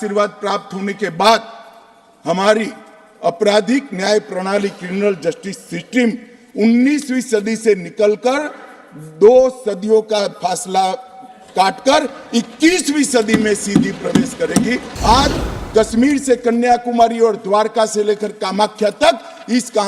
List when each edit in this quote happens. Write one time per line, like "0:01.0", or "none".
0:14.8